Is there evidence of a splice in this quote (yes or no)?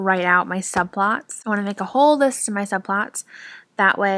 no